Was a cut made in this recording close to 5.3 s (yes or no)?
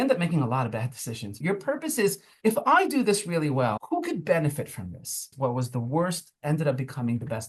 yes